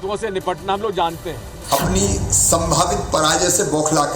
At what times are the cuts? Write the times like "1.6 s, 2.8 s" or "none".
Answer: 1.5 s